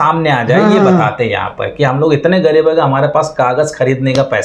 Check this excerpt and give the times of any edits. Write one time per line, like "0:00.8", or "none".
none